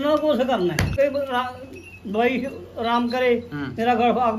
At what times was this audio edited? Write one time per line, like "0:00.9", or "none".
0:00.9